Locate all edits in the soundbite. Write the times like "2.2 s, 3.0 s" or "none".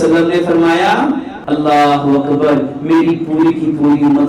1.3 s